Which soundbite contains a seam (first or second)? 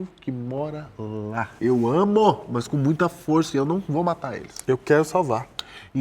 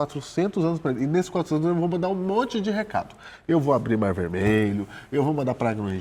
first